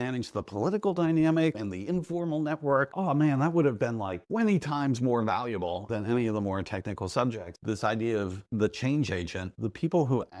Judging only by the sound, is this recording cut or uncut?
cut